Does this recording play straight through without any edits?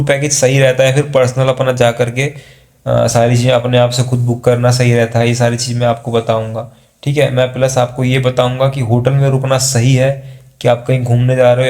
yes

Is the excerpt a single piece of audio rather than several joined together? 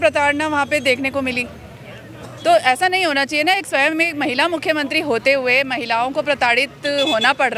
yes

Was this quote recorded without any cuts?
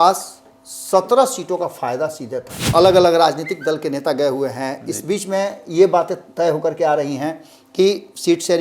no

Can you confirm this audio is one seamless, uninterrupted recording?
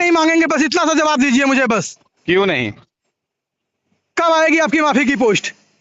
yes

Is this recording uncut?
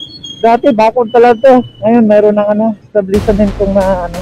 no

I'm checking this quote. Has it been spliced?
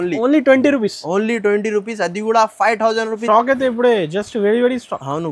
yes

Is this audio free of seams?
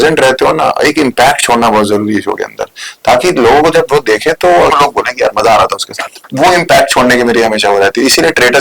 no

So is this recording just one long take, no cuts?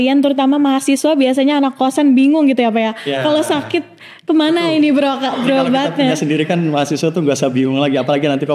yes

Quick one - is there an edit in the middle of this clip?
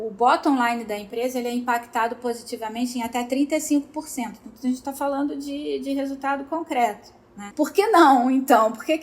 yes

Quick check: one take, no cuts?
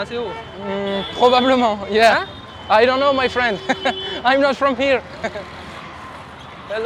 yes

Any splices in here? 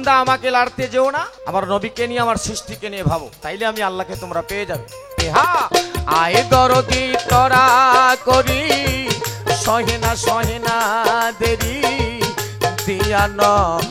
yes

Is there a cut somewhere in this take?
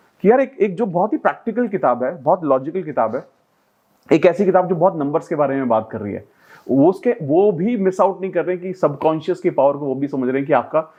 no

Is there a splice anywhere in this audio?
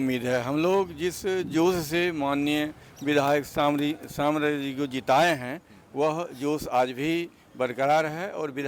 no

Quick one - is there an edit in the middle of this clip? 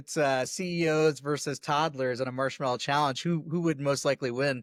no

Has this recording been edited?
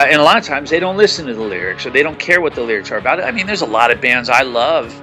no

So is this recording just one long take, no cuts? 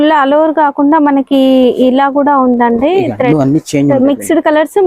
no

